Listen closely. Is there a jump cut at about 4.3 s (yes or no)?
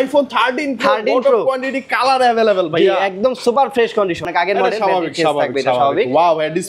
yes